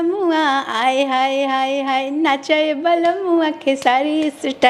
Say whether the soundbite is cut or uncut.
uncut